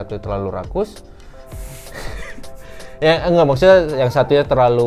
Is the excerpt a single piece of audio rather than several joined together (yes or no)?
yes